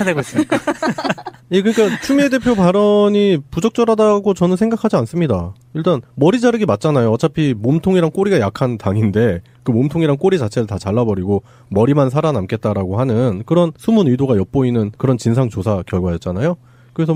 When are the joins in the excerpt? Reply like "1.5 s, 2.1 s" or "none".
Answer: none